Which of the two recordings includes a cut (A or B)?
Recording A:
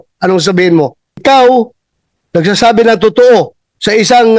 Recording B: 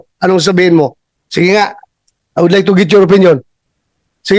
A